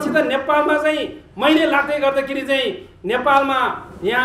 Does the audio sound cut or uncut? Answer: uncut